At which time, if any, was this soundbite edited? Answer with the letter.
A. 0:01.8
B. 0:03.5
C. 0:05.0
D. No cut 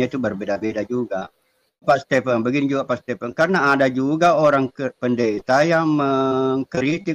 A